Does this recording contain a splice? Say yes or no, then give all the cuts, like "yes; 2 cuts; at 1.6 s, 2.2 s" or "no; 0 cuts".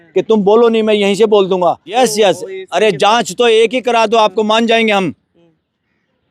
yes; 1 cut; at 1.9 s